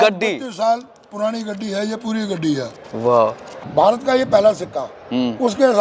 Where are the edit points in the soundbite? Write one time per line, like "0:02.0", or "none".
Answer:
0:03.6

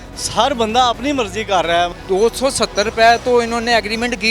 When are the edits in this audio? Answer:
0:02.0

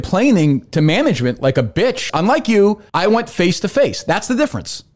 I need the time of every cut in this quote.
0:02.0
0:02.8

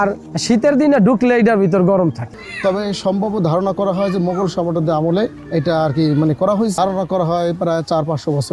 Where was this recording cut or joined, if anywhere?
0:02.3
0:06.8

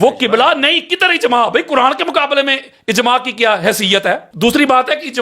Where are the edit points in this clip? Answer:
0:04.3

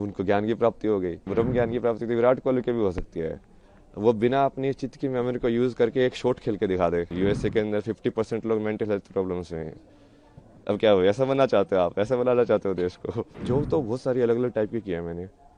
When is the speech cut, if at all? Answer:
0:01.2
0:07.1
0:13.3

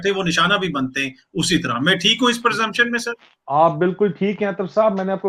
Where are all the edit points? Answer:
none

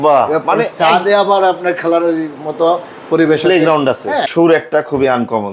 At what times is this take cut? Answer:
0:04.2

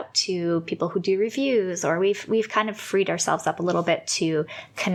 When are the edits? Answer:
none

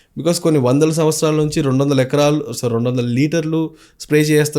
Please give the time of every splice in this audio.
none

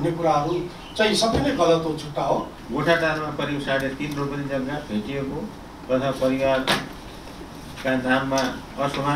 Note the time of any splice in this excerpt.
0:02.6

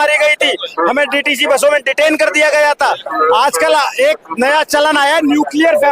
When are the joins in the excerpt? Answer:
0:03.0

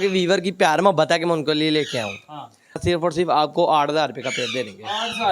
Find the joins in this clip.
0:02.8

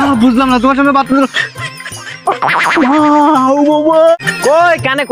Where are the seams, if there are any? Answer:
0:04.2

